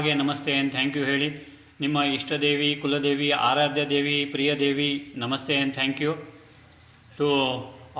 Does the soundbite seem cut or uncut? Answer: uncut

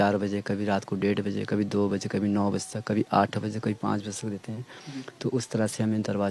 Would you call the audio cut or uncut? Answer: uncut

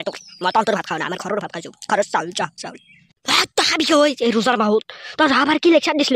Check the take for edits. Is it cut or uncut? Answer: uncut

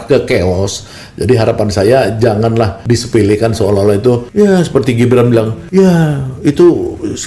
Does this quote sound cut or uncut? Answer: cut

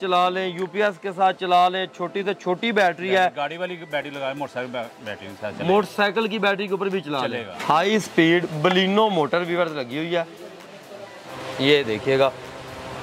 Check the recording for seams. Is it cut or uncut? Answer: cut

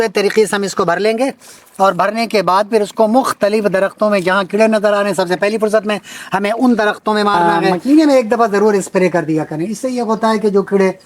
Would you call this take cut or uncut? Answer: cut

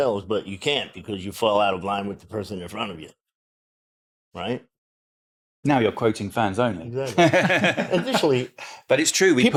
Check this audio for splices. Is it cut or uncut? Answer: uncut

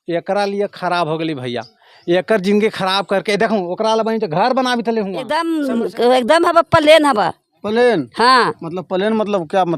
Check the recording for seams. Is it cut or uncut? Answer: cut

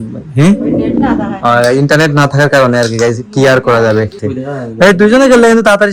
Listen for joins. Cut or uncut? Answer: cut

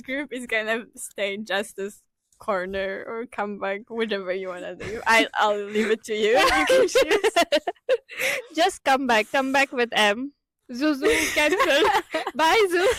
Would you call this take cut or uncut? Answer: uncut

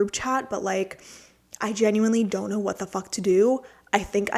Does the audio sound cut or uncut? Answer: uncut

